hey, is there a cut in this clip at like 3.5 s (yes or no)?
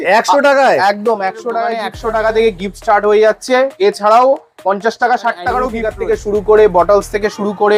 no